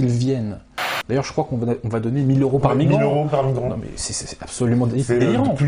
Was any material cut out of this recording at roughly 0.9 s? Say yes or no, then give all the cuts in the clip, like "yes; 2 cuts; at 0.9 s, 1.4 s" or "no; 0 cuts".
yes; 1 cut; at 0.9 s